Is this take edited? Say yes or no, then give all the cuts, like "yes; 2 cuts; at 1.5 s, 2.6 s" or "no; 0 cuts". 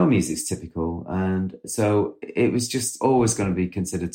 yes; 2 cuts; at 1.6 s, 2.9 s